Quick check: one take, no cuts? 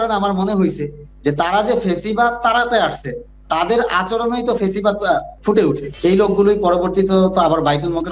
no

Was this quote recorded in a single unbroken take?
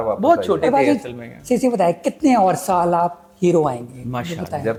yes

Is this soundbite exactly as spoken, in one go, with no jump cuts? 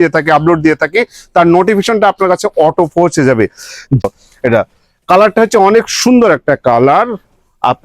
no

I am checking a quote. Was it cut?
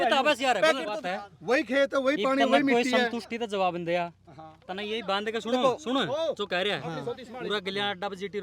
yes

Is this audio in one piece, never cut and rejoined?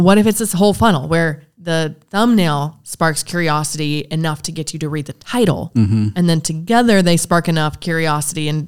no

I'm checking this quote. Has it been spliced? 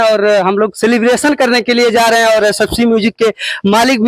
no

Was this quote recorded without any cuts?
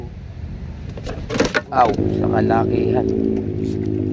no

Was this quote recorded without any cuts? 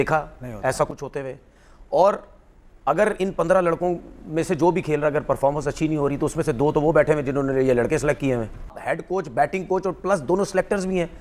yes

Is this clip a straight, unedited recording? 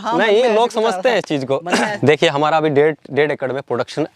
no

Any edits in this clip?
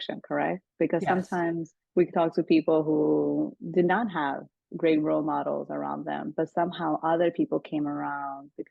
yes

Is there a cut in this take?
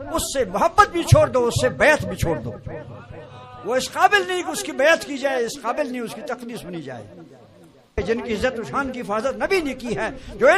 yes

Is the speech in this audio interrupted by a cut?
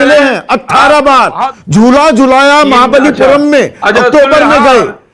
yes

